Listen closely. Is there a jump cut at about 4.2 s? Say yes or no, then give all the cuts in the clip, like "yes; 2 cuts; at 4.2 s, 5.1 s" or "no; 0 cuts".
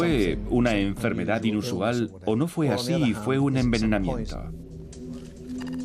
no; 1 cut; at 1.7 s